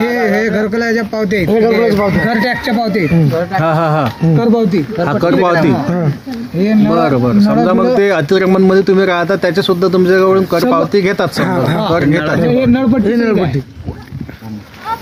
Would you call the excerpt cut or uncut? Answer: uncut